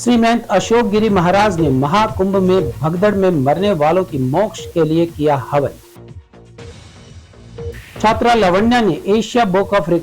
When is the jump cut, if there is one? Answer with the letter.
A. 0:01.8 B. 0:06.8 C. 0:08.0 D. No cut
C